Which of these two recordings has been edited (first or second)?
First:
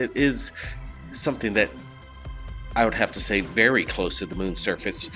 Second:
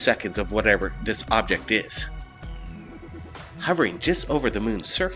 first